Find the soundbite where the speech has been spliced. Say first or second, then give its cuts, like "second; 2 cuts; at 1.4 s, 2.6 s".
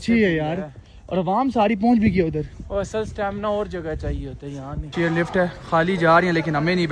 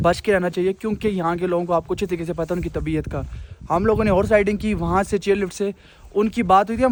first; 1 cut; at 4.8 s